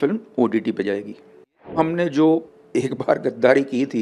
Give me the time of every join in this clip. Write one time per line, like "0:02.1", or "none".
0:01.8
0:02.6